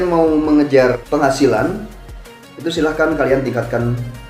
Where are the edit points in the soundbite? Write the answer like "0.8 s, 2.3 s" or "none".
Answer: 1.0 s